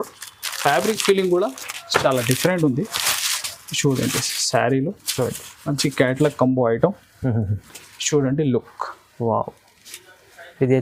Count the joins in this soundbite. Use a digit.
0